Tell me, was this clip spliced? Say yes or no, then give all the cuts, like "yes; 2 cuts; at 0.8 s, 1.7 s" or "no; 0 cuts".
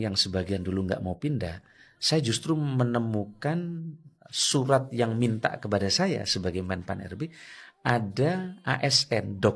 no; 0 cuts